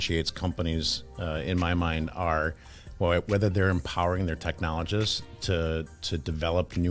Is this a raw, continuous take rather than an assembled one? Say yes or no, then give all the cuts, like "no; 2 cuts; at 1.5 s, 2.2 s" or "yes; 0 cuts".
yes; 0 cuts